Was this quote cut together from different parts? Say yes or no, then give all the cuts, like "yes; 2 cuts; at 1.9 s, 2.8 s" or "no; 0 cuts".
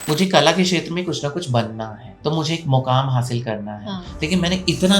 yes; 1 cut; at 2.1 s